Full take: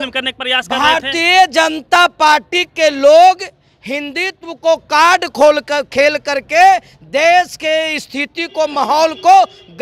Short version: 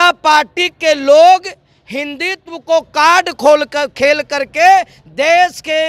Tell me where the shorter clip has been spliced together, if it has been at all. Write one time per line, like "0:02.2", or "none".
none